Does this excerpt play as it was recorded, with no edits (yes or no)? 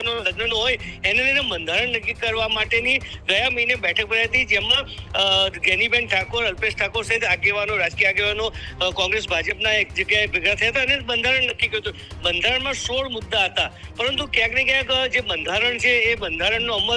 yes